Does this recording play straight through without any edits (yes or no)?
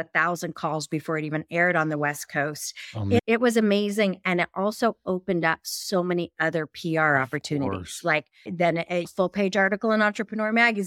yes